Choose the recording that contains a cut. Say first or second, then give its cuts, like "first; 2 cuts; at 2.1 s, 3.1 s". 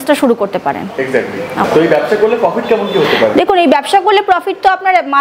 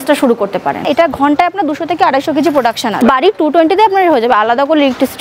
second; 2 cuts; at 0.8 s, 3.0 s